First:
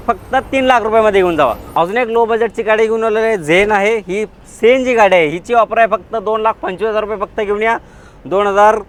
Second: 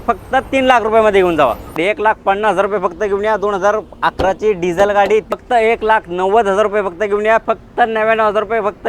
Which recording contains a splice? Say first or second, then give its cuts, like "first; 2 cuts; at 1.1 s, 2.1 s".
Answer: second; 3 cuts; at 1.8 s, 5.3 s, 7.4 s